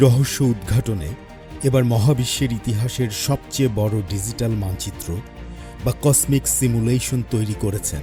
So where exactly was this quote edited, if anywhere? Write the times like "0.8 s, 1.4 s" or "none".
none